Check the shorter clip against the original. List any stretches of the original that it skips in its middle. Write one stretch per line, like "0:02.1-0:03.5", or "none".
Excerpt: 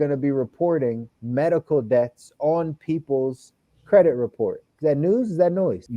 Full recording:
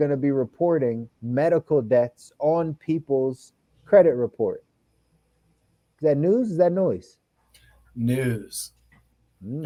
0:04.7-0:05.9